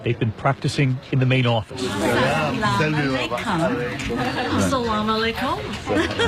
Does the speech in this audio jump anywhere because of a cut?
no; 0 cuts

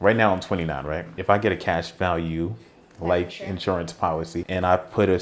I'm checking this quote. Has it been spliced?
yes; 2 cuts; at 1.1 s, 4.5 s

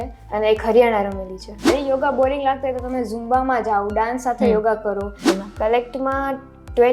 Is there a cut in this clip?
yes; 2 cuts; at 1.6 s, 5.2 s

